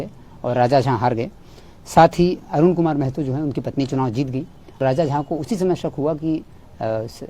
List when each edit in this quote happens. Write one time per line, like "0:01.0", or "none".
0:04.8